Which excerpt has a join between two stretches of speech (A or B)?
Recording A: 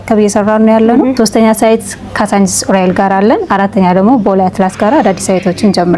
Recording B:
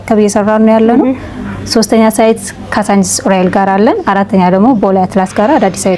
A